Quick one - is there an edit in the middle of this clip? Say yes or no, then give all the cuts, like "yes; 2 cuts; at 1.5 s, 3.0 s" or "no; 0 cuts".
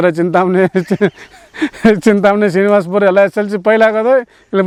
no; 0 cuts